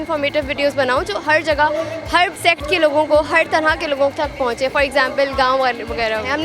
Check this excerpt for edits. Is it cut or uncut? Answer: cut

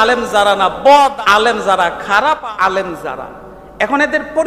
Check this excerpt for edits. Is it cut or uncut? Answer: cut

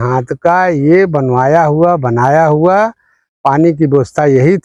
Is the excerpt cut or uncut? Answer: uncut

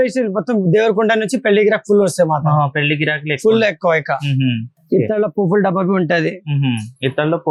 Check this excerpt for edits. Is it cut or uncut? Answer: uncut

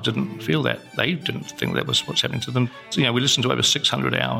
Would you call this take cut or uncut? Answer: cut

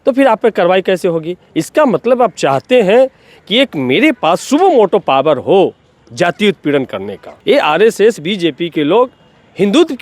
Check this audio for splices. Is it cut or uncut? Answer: cut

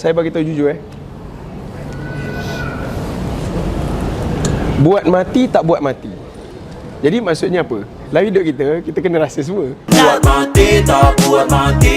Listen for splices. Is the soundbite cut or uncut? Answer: cut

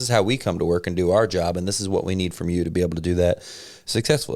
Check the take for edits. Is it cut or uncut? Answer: uncut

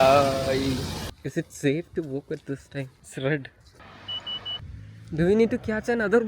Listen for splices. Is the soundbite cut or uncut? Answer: cut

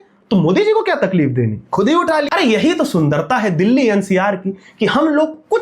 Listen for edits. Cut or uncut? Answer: cut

